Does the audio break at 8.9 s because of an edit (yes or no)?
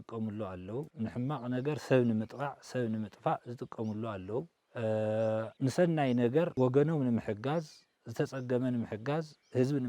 no